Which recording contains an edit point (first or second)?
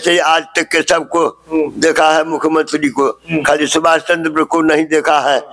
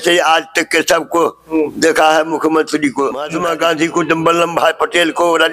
second